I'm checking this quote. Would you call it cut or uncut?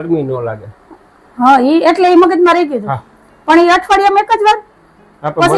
uncut